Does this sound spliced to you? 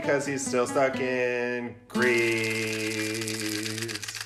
no; 0 cuts

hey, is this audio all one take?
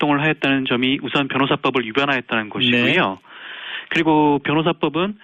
yes; 0 cuts

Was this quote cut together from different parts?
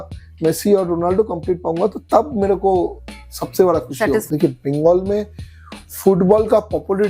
yes; 1 cut; at 4.3 s

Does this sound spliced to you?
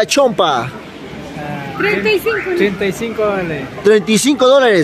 no; 0 cuts

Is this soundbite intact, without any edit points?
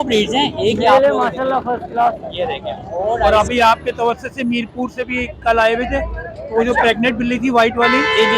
no; 1 cut; at 3.2 s

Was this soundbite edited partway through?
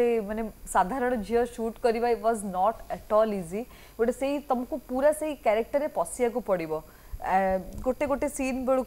no; 0 cuts

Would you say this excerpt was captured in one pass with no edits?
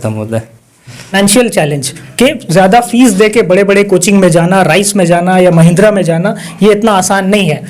no; 1 cut; at 1.1 s

